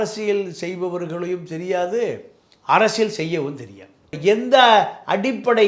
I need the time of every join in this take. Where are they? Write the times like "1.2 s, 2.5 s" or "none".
4.1 s